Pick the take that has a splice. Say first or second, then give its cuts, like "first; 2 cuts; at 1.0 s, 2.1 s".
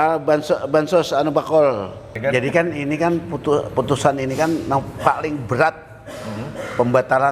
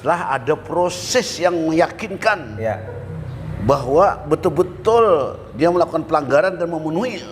first; 1 cut; at 2.1 s